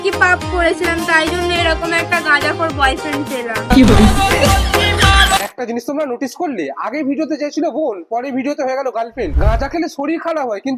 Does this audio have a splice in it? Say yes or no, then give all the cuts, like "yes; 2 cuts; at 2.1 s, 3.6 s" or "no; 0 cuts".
no; 0 cuts